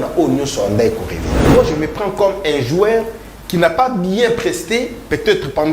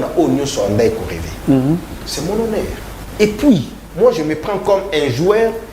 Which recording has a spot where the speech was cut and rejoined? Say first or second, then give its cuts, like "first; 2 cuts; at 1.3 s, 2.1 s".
first; 1 cut; at 1.5 s